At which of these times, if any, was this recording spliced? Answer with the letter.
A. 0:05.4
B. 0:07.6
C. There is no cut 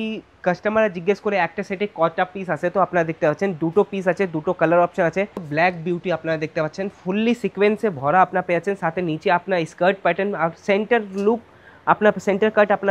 A